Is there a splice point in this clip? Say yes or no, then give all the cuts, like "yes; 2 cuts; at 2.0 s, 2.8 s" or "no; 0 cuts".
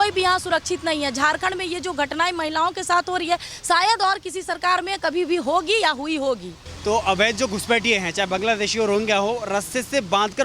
no; 0 cuts